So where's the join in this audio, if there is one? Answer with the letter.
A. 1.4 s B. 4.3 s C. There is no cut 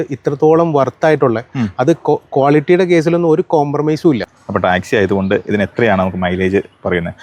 B